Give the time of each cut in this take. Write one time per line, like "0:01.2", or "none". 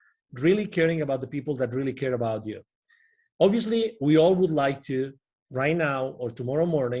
none